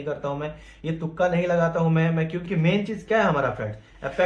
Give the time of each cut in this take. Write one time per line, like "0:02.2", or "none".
0:02.4